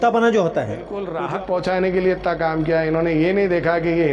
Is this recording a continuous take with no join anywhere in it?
no; 1 cut; at 1.0 s

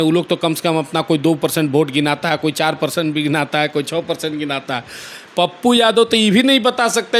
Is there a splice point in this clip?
no; 0 cuts

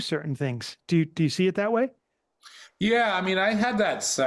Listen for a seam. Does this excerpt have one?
no; 0 cuts

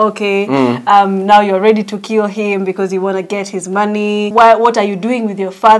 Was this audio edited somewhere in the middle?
yes; 1 cut; at 4.3 s

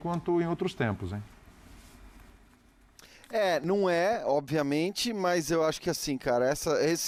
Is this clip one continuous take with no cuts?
yes; 0 cuts

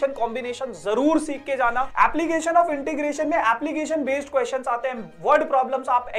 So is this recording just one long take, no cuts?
no; 1 cut; at 1.9 s

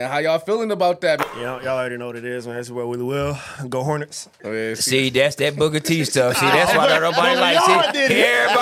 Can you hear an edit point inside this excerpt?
yes; 2 cuts; at 1.2 s, 4.3 s

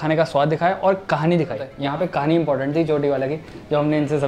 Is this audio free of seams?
no; 1 cut; at 1.7 s

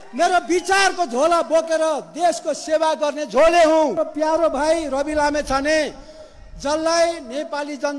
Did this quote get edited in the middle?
yes; 1 cut; at 4.0 s

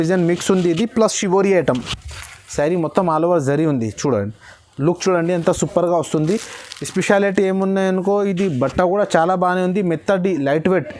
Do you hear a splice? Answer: no; 0 cuts

